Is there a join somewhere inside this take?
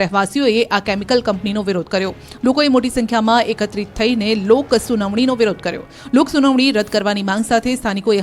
yes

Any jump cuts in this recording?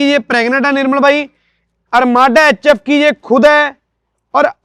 no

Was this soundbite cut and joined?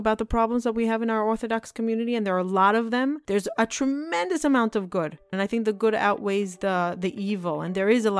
yes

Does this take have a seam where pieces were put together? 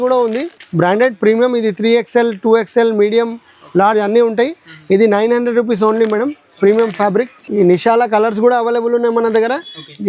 no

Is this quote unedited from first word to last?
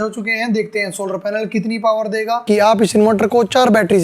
no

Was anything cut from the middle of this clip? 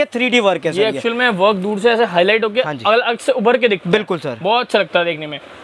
no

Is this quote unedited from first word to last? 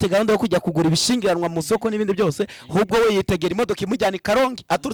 yes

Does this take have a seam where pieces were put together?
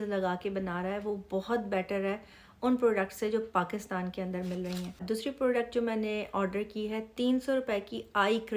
yes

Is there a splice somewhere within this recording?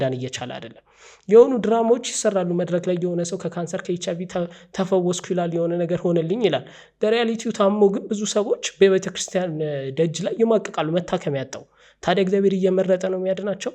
no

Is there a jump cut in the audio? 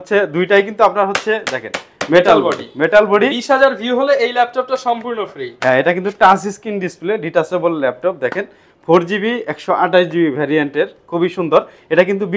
no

